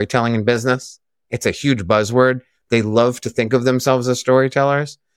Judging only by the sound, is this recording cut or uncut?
uncut